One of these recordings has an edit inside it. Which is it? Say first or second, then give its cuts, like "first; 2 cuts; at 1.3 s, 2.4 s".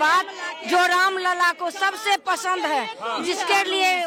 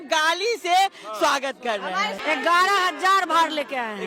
second; 1 cut; at 2.2 s